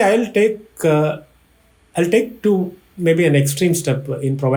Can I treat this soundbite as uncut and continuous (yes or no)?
yes